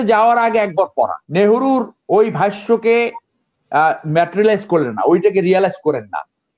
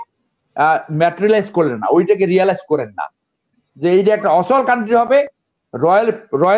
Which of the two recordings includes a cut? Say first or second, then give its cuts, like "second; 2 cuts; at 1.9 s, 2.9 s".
first; 1 cut; at 1.2 s